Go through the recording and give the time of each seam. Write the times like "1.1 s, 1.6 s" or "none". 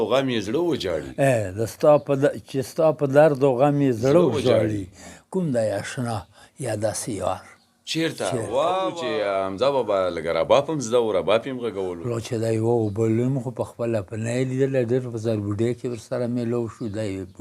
9.0 s